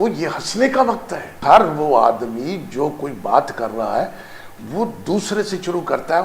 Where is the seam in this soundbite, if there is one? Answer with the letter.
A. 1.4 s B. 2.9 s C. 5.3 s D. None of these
A